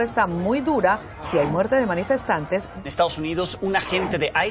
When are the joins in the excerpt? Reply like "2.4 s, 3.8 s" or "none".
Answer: 2.8 s